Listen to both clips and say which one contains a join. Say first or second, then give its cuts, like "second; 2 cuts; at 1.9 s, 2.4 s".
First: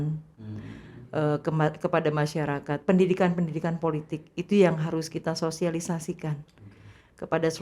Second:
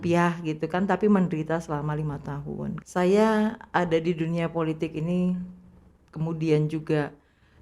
second; 1 cut; at 2.8 s